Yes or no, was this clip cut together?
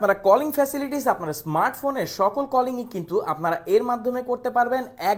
no